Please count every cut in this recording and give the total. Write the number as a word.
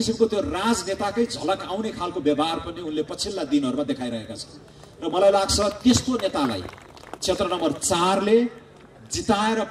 zero